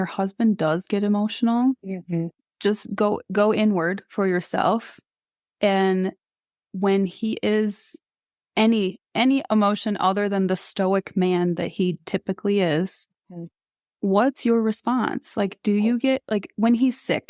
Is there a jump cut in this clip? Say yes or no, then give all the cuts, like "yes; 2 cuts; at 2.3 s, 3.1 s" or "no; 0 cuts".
no; 0 cuts